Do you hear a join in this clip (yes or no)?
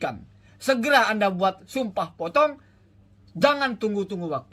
no